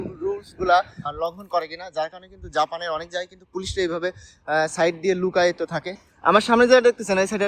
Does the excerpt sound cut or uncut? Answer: cut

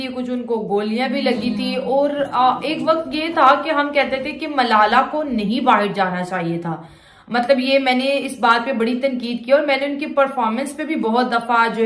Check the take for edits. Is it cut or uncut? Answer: uncut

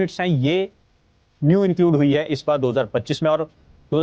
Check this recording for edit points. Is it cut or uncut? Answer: uncut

